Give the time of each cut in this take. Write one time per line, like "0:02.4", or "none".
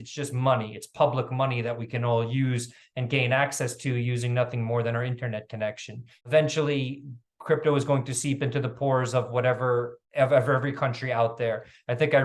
0:06.1